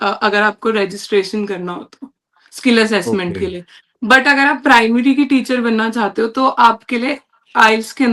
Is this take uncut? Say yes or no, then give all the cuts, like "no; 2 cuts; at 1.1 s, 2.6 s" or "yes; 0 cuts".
yes; 0 cuts